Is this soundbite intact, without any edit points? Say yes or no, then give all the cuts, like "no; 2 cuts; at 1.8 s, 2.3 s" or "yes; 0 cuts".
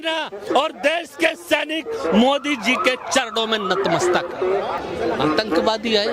no; 1 cut; at 4.8 s